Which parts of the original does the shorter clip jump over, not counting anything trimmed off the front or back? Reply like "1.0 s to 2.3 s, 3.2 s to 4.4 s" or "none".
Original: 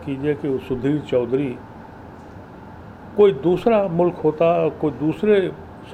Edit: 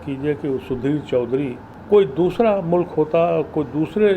1.7 s to 3.0 s